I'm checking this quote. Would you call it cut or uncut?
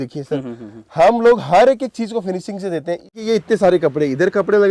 cut